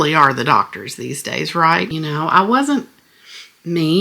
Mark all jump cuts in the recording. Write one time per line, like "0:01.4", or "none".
0:01.9

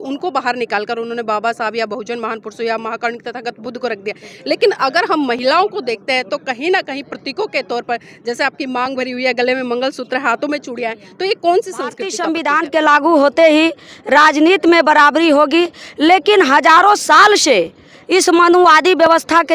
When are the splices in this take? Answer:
0:12.2

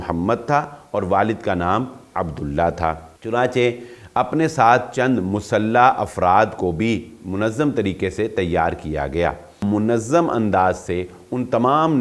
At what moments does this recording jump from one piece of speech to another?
0:03.1
0:09.6

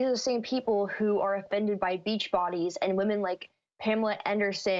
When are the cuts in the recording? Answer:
none

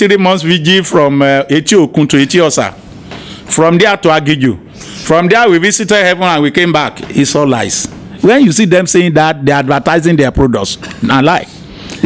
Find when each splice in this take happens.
none

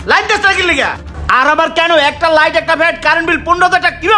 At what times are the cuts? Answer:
0:01.0

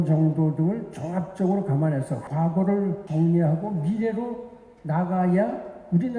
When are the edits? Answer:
0:02.2
0:03.0

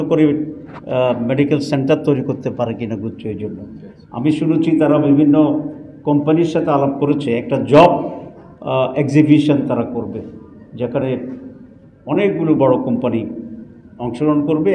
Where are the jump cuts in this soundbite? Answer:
none

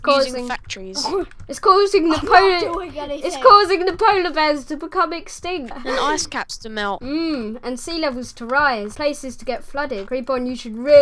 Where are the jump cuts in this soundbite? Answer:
0:05.8
0:07.0
0:08.9
0:10.1

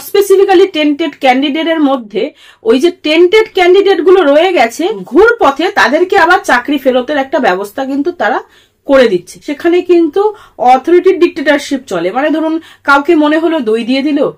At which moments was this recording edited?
0:05.0
0:09.5

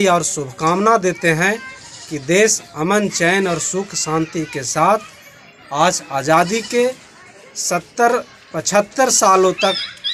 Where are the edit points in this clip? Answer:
none

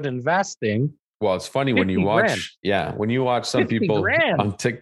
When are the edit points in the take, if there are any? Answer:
0:01.0
0:02.5

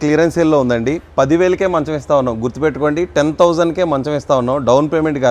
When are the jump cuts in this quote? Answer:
none

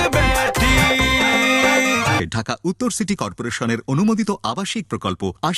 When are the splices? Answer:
0:02.2

